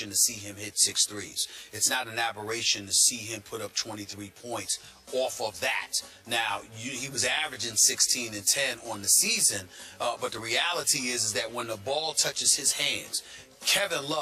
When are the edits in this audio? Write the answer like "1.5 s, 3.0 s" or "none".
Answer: 5.9 s

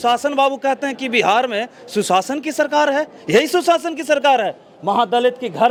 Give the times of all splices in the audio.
none

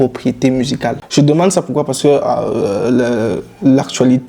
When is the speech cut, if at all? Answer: 1.0 s

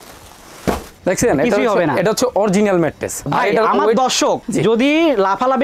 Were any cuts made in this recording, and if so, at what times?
0.9 s, 3.2 s

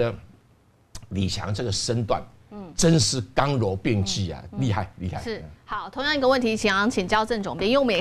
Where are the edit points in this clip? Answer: none

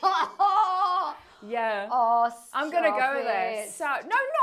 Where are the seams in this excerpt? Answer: none

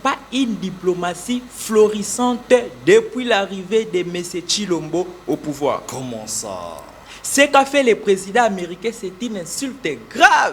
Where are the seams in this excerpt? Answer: none

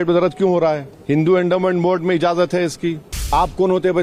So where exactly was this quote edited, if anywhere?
0.9 s, 3.3 s

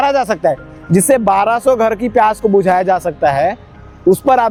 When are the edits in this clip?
none

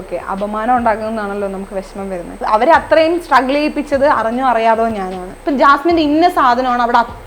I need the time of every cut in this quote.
2.4 s, 5.3 s

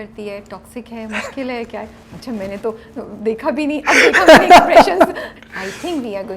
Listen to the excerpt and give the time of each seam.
5.3 s

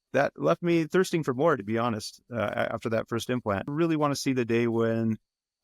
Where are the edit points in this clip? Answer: 3.7 s

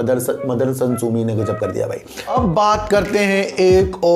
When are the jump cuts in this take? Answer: 2.3 s

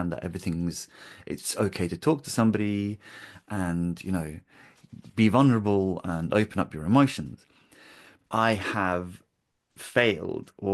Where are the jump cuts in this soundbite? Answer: 8.1 s

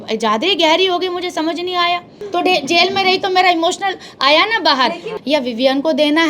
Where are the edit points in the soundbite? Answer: 2.2 s, 5.1 s

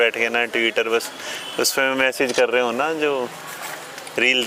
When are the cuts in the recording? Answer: none

